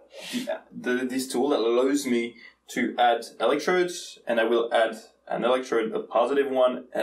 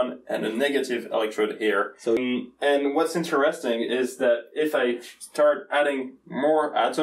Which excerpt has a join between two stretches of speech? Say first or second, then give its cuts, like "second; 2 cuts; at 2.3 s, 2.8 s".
second; 1 cut; at 2.2 s